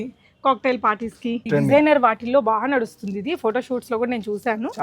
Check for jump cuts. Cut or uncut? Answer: cut